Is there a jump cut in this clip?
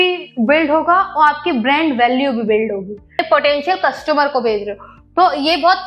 yes; 1 cut; at 3.2 s

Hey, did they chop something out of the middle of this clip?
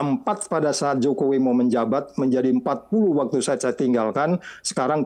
no; 0 cuts

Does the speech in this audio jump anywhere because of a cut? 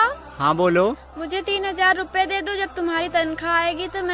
yes; 1 cut; at 1.0 s

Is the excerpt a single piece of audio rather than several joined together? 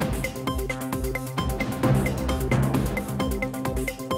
yes; 0 cuts

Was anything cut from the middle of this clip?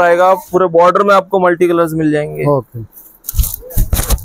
no; 0 cuts

